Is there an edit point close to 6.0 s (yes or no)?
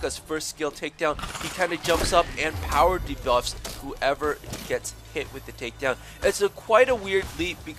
no